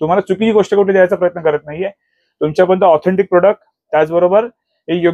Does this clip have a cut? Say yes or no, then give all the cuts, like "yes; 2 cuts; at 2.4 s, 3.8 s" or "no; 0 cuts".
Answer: no; 0 cuts